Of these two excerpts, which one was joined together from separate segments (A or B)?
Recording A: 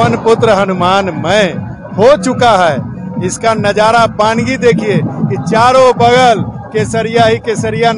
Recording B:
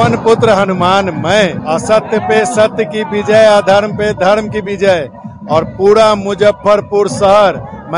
B